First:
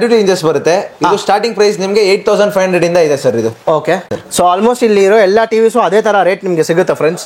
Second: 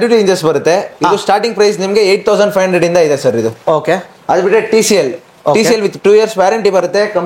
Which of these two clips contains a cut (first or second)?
first